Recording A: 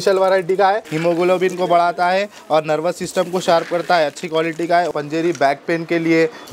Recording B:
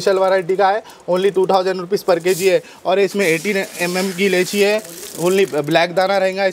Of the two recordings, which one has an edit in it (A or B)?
A